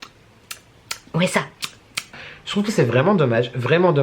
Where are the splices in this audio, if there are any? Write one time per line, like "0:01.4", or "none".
0:02.1